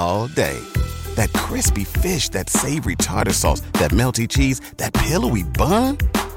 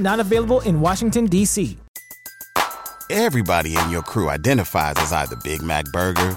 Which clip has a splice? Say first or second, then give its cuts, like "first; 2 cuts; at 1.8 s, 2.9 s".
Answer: second; 1 cut; at 1.8 s